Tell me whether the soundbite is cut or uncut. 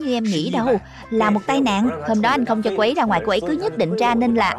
uncut